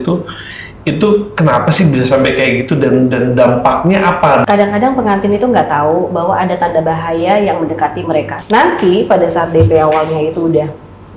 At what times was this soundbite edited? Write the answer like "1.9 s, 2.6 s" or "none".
4.4 s, 8.3 s